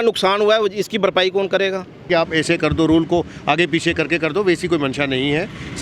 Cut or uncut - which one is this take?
cut